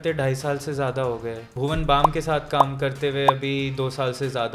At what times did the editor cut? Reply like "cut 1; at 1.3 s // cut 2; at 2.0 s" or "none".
cut 1; at 1.5 s